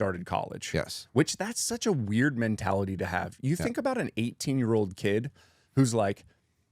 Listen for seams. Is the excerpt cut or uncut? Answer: uncut